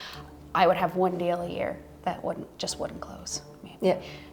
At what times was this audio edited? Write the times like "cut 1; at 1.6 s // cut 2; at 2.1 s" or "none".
none